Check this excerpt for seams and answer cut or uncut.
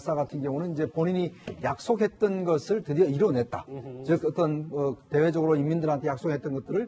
uncut